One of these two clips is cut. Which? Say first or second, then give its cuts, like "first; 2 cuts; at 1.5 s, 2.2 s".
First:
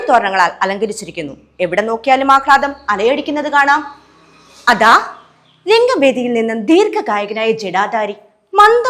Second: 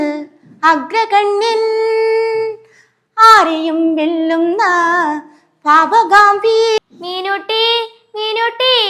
second; 1 cut; at 6.8 s